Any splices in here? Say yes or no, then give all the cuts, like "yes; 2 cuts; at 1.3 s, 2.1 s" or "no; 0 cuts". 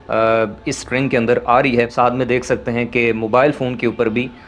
yes; 1 cut; at 1.9 s